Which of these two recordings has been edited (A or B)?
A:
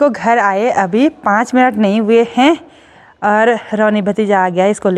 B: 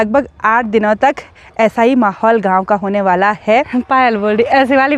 B